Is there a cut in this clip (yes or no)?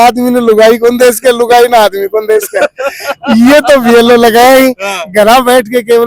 no